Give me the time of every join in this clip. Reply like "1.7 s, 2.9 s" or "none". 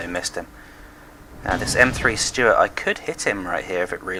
none